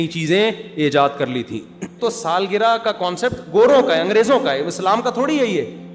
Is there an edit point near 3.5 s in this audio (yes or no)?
no